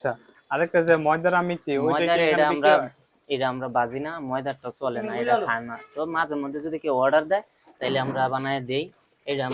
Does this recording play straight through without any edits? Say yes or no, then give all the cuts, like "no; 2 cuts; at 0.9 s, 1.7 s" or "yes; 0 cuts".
yes; 0 cuts